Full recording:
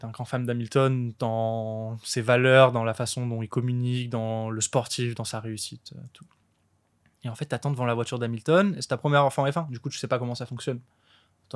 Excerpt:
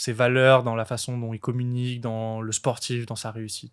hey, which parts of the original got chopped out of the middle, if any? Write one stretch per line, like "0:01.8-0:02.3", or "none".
none